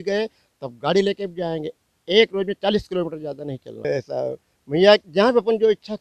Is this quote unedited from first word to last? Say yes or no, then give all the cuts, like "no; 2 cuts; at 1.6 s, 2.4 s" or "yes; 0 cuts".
no; 1 cut; at 3.8 s